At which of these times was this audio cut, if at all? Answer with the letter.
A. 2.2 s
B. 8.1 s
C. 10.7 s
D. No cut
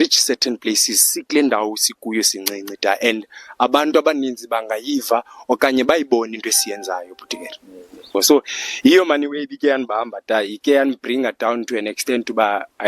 B